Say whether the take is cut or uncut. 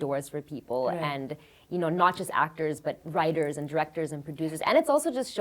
uncut